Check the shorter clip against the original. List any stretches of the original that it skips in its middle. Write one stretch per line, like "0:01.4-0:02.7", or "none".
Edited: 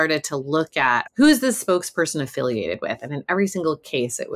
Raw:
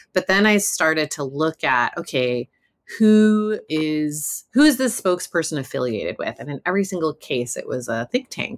0:01.9-0:04.4